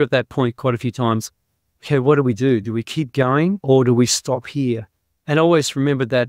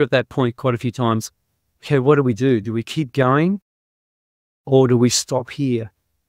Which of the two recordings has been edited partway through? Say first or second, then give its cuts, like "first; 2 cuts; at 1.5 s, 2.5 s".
first; 1 cut; at 3.6 s